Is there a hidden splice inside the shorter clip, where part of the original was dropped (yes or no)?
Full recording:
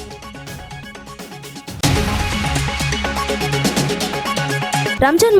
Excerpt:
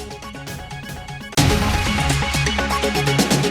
yes